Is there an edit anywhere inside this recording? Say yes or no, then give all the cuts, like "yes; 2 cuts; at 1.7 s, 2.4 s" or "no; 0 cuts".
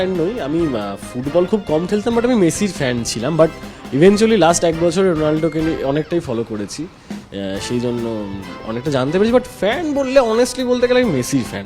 no; 0 cuts